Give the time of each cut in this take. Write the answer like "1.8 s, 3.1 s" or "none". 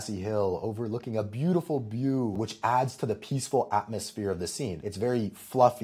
2.4 s, 4.8 s